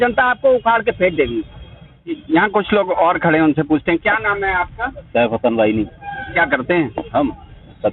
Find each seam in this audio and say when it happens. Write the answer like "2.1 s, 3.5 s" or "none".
none